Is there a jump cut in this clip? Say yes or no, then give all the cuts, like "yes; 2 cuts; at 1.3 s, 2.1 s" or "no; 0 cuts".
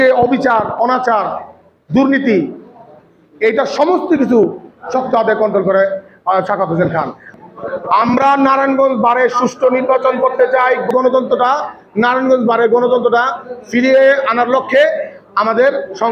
yes; 2 cuts; at 7.2 s, 10.9 s